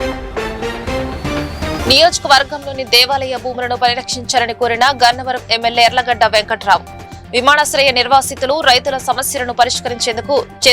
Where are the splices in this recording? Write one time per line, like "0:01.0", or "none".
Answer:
0:01.8